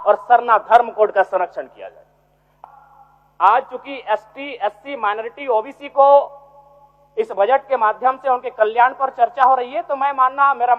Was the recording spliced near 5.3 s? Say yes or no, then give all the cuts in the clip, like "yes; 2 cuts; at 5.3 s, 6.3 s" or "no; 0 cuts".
no; 1 cut; at 2.5 s